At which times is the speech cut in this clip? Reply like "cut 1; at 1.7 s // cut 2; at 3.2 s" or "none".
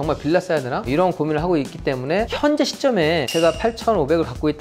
cut 1; at 2.3 s